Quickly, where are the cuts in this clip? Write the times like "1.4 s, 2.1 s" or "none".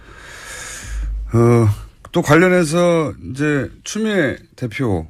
2.3 s